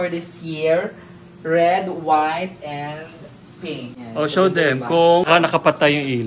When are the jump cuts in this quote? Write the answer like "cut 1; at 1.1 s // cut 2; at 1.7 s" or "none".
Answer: cut 1; at 4.0 s // cut 2; at 5.3 s